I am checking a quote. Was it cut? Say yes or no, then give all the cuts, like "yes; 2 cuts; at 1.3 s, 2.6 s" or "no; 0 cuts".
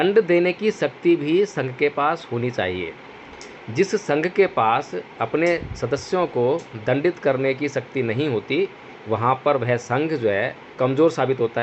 yes; 1 cut; at 10.7 s